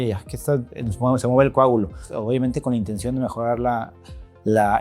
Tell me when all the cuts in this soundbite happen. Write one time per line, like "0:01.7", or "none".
0:02.1